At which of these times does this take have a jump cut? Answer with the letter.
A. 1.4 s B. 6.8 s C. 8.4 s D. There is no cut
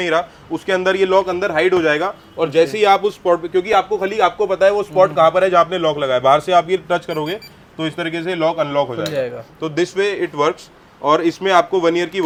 D